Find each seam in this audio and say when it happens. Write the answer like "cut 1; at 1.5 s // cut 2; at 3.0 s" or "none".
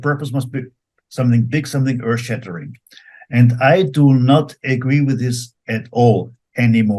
none